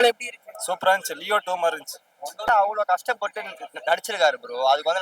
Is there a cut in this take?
yes; 1 cut; at 2.4 s

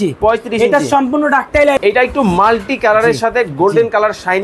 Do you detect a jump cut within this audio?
yes; 1 cut; at 1.8 s

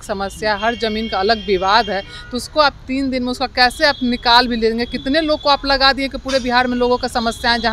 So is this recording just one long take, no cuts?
yes; 0 cuts

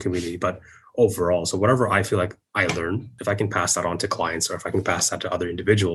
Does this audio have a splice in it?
no; 0 cuts

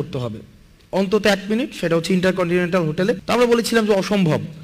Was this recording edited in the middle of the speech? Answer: yes; 1 cut; at 3.2 s

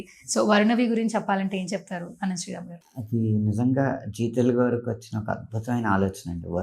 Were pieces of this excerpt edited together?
no; 0 cuts

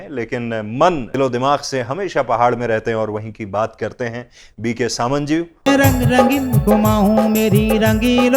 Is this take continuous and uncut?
no; 2 cuts; at 1.1 s, 5.6 s

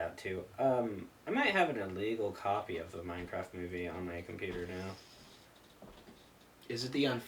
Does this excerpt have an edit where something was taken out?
no; 0 cuts

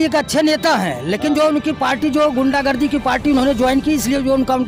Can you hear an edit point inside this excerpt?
no; 0 cuts

